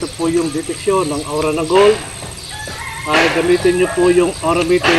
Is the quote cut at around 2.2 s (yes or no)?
no